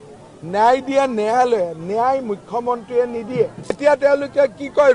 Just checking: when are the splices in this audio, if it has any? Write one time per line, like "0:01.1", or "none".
0:03.8